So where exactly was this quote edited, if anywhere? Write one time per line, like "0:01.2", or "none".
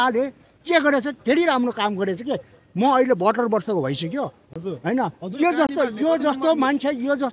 none